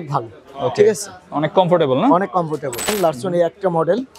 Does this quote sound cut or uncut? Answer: cut